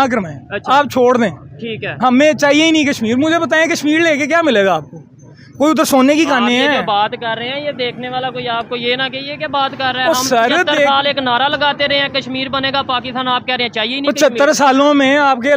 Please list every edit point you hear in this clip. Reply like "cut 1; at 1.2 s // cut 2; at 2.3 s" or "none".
none